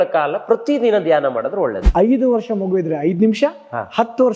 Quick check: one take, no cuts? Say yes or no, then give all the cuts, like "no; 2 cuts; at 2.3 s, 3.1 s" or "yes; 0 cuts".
no; 1 cut; at 1.8 s